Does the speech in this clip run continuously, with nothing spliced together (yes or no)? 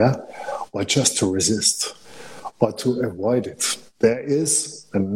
yes